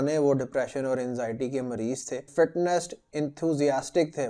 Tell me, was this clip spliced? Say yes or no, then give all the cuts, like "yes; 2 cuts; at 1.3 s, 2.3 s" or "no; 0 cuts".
yes; 1 cut; at 2.3 s